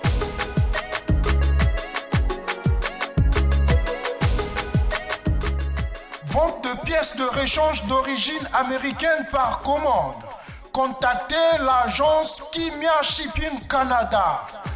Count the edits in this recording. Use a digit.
0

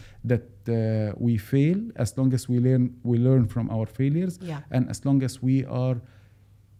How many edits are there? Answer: 0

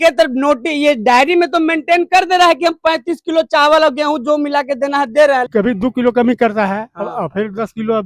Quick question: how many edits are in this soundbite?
1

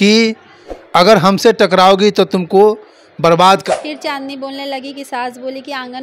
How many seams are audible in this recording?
1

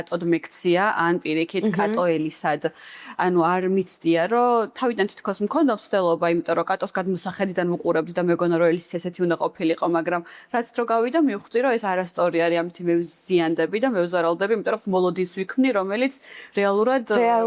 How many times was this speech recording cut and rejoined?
0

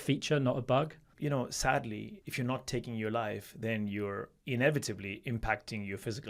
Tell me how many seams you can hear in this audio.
2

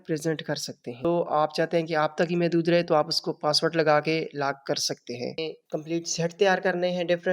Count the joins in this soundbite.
2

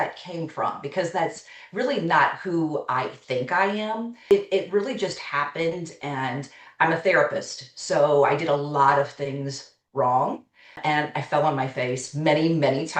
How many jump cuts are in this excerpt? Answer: 1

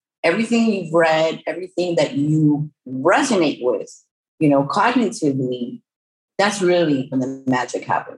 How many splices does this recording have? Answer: 1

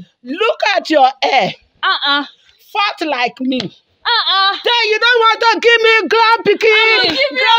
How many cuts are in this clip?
0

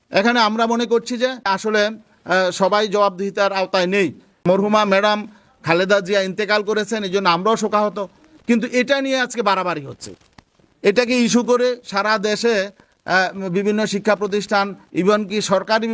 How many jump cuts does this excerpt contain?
2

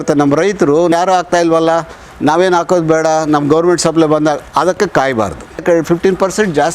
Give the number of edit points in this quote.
2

